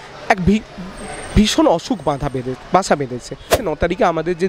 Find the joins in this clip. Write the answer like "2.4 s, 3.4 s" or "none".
3.6 s